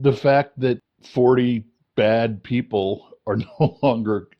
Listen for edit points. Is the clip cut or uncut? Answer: cut